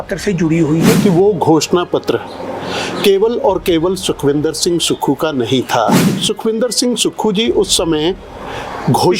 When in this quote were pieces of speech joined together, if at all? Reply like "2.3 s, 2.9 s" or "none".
1.0 s, 6.1 s